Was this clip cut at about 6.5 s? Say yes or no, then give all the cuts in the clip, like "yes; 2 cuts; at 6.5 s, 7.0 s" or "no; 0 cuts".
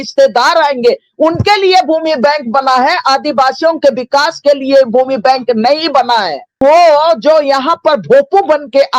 yes; 1 cut; at 6.5 s